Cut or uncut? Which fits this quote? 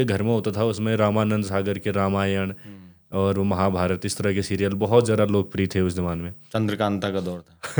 uncut